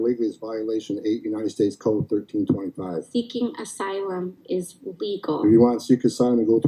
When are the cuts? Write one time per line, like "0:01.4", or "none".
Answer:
none

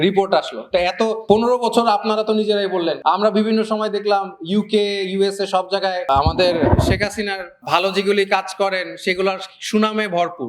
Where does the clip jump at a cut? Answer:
0:01.2
0:03.0
0:06.0
0:07.5

